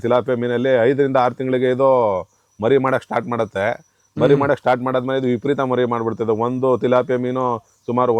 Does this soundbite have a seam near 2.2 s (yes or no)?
no